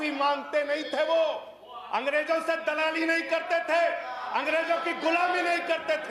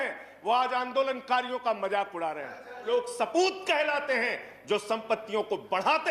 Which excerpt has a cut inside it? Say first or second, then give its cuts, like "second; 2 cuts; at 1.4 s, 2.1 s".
second; 1 cut; at 2.9 s